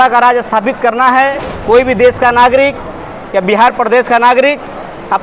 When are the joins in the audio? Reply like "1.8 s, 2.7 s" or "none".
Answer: 1.5 s